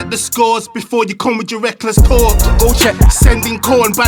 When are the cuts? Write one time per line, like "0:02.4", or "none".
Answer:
none